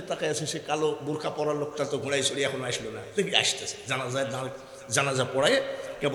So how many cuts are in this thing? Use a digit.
0